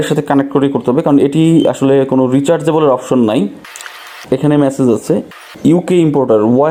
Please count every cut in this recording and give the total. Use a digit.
0